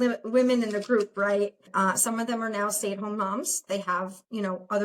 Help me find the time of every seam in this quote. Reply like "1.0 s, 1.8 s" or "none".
1.7 s